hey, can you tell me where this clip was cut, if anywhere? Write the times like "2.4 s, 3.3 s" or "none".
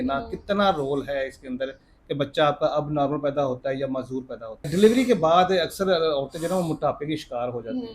4.7 s